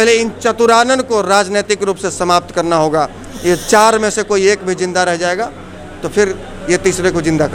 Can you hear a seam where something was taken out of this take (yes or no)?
no